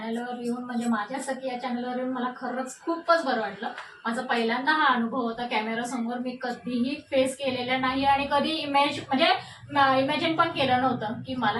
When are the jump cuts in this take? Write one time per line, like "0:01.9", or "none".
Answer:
none